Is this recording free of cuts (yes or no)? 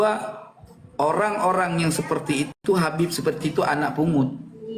yes